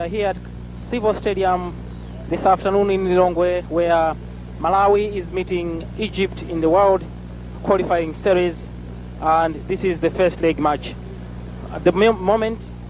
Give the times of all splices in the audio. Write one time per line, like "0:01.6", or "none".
none